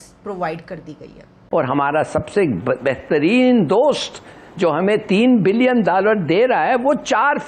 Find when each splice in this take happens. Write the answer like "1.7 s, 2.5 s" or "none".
1.4 s